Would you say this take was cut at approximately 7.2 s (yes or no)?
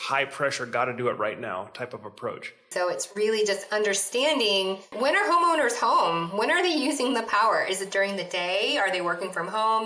no